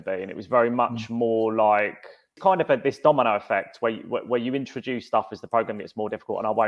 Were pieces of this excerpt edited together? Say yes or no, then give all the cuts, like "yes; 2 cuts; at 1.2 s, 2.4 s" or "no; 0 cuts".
yes; 1 cut; at 2.3 s